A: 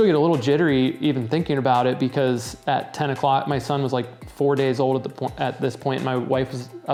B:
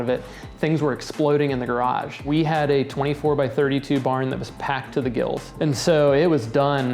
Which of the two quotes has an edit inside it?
B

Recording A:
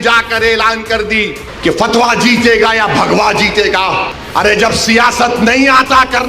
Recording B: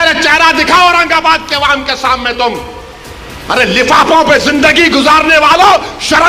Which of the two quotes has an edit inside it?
A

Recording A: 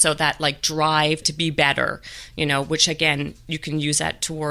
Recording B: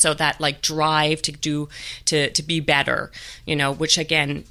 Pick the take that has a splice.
A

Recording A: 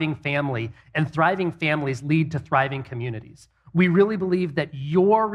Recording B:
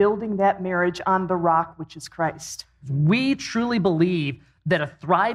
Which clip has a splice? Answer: B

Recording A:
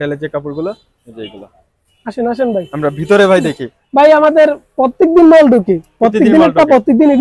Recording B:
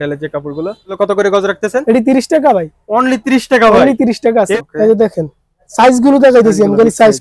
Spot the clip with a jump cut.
B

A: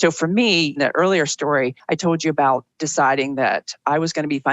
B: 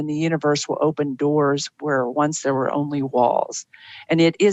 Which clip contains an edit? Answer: A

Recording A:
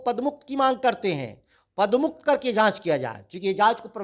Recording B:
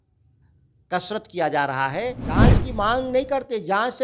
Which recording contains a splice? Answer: B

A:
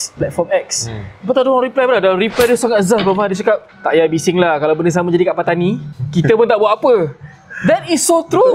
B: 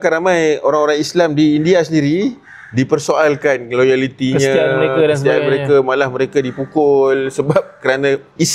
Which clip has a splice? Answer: A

